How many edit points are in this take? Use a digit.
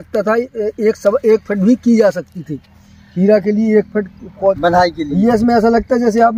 1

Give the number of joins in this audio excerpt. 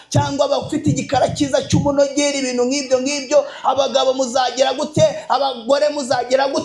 0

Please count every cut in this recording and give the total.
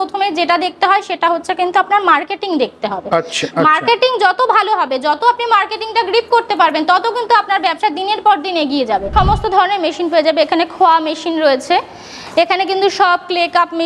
1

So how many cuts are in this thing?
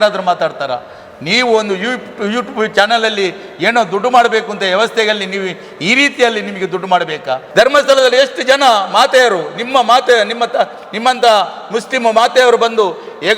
1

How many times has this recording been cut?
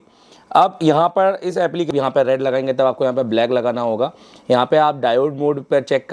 1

